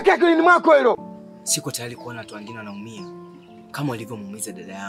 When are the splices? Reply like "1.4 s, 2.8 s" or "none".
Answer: 1.1 s